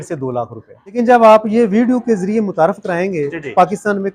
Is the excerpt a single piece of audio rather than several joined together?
no; 1 cut; at 0.9 s

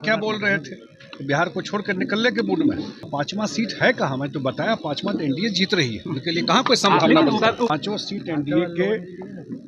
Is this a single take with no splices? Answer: no; 2 cuts; at 3.0 s, 7.7 s

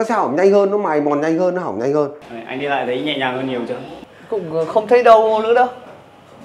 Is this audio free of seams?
no; 2 cuts; at 2.2 s, 3.9 s

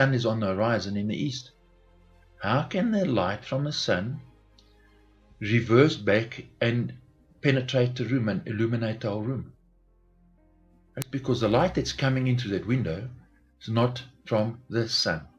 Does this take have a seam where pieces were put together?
no; 0 cuts

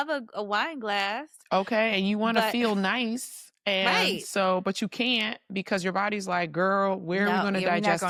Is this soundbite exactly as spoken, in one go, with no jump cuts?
yes; 0 cuts

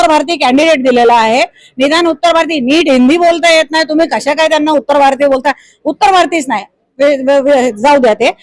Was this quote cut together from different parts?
no; 0 cuts

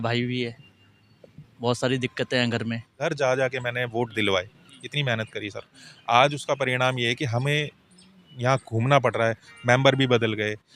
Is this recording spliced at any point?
yes; 1 cut; at 3.1 s

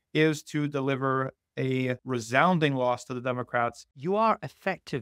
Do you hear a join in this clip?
yes; 2 cuts; at 2.0 s, 3.9 s

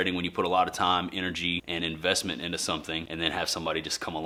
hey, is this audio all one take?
yes; 0 cuts

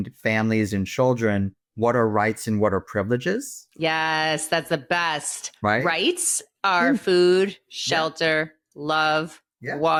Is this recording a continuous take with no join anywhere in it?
yes; 0 cuts

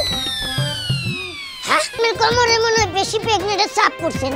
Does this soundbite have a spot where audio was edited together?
yes; 1 cut; at 1.9 s

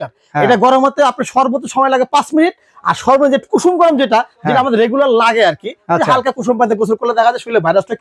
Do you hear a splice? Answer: no; 0 cuts

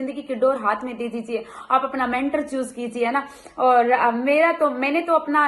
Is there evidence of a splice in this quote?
no; 0 cuts

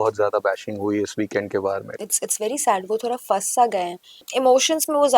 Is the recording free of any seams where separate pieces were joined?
no; 2 cuts; at 1.9 s, 4.2 s

